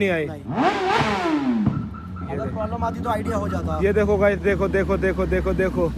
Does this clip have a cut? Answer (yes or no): no